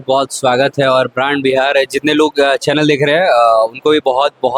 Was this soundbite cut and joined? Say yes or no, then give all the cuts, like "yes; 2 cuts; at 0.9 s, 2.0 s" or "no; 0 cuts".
no; 0 cuts